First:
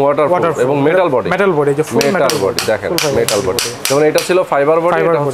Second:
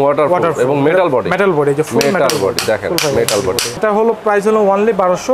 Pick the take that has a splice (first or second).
second